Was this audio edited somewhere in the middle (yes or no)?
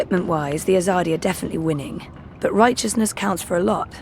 no